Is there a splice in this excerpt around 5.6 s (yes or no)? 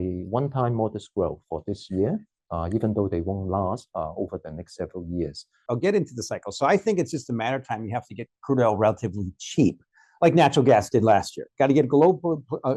yes